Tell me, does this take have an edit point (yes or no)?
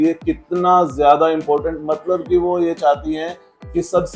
no